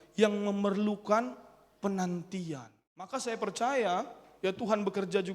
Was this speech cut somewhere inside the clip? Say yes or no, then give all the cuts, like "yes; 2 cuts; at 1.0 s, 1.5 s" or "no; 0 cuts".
yes; 1 cut; at 3.1 s